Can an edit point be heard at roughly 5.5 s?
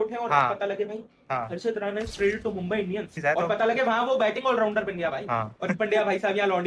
yes; 2 cuts; at 3.1 s, 5.5 s

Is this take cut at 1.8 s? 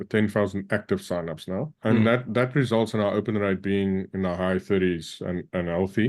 yes; 1 cut; at 1.8 s

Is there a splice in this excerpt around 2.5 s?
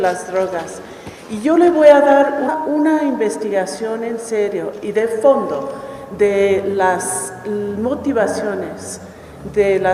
no; 0 cuts

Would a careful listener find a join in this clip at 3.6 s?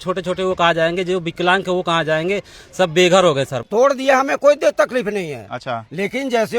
yes; 1 cut; at 3.6 s

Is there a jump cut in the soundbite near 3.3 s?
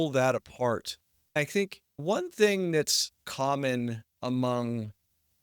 yes; 1 cut; at 3.3 s

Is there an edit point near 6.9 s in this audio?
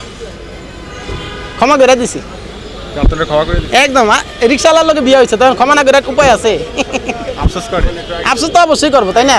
no; 0 cuts

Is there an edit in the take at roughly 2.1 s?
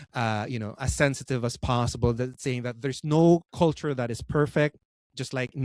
no; 1 cut; at 3.5 s

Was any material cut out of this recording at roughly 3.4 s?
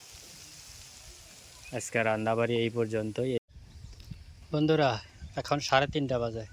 yes; 1 cut; at 3.4 s

